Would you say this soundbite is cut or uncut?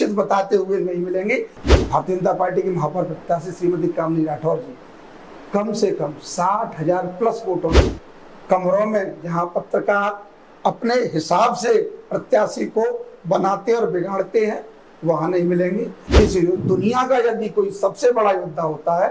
cut